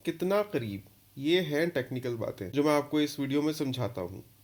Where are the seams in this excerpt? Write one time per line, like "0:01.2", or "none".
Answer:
none